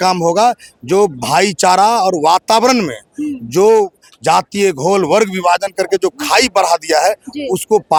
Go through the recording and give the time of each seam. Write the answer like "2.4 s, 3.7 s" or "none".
none